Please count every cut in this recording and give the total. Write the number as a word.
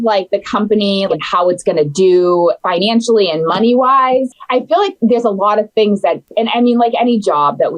three